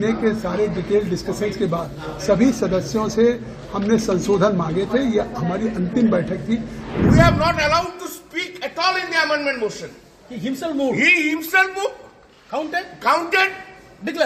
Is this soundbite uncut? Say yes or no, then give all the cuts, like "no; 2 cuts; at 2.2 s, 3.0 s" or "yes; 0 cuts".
no; 1 cut; at 6.8 s